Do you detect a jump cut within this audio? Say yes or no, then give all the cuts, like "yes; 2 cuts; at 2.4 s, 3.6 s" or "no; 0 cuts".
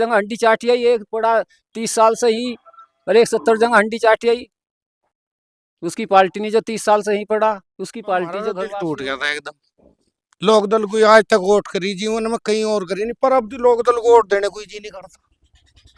yes; 1 cut; at 8.6 s